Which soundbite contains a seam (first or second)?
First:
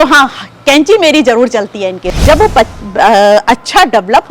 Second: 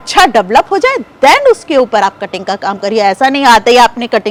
first